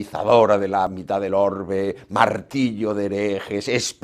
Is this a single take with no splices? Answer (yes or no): no